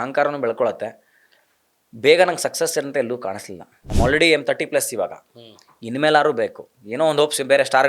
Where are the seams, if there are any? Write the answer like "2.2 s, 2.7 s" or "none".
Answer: 3.8 s

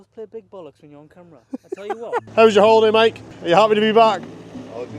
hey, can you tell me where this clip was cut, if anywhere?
2.2 s

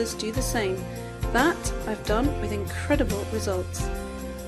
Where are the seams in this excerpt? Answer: 2.1 s

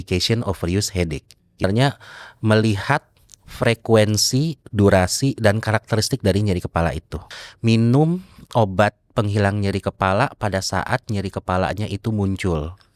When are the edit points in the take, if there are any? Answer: 1.6 s, 7.3 s

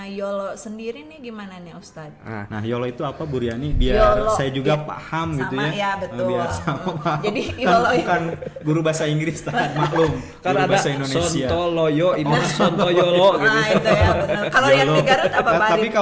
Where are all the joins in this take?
none

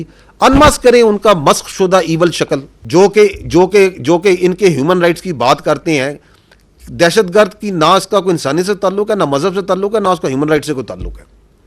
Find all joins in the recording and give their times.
2.7 s

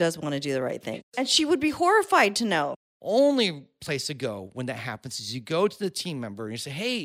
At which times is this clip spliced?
1.0 s, 2.7 s

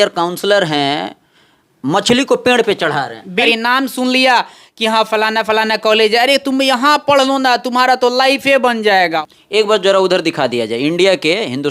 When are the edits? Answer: 3.5 s, 9.2 s

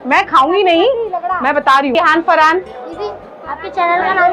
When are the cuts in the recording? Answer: 2.0 s

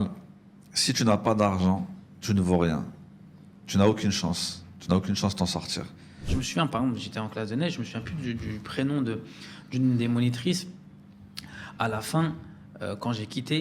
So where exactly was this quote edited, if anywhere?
6.2 s

